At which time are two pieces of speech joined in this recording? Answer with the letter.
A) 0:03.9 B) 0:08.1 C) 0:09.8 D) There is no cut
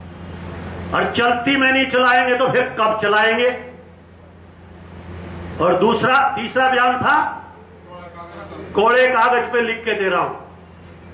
D